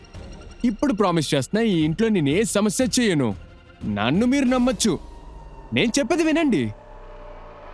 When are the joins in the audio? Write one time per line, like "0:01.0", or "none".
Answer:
0:06.8